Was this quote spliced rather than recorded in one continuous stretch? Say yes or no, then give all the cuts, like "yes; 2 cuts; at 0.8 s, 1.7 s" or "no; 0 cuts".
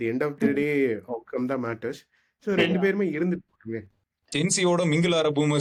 no; 0 cuts